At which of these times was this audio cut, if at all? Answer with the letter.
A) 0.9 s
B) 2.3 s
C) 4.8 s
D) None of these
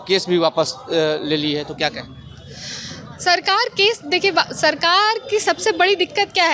D